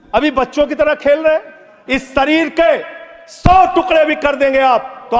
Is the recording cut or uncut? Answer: cut